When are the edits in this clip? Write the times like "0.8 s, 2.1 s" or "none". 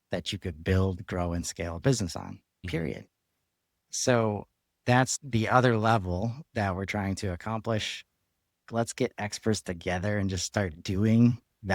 2.6 s, 5.1 s, 8.6 s